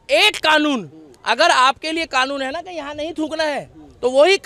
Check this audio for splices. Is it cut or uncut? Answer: uncut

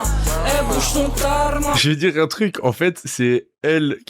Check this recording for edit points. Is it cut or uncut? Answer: cut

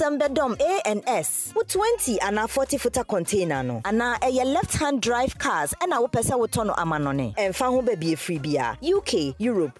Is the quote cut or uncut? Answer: uncut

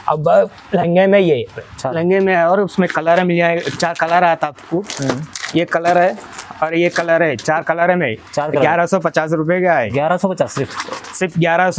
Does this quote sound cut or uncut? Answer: uncut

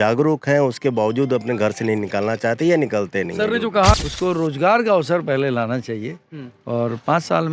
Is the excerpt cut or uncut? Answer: cut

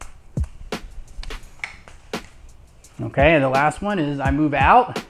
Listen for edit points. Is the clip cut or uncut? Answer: cut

